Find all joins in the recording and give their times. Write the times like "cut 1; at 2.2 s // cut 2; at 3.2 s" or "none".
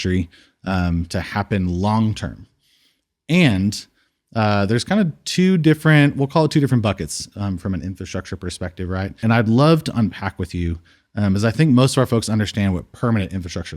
cut 1; at 9.2 s